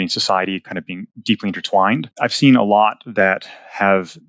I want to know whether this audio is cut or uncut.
uncut